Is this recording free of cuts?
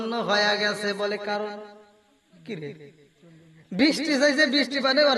yes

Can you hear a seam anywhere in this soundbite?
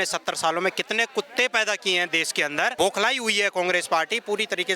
yes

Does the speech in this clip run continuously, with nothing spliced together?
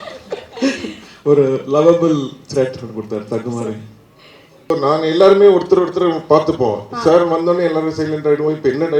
no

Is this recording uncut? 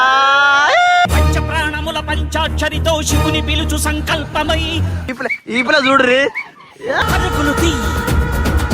no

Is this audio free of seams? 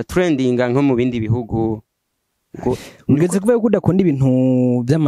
no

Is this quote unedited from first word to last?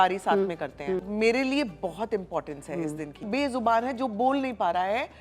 no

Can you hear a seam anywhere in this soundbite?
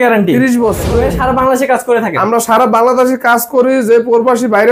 yes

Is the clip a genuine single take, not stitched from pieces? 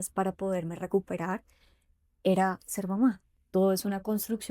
no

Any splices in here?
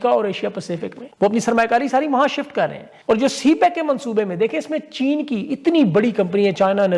no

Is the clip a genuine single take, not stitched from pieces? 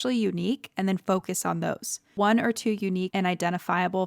no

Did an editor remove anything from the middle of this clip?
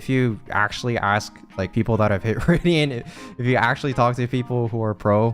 yes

